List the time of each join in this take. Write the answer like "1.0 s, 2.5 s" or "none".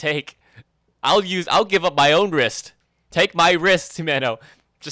none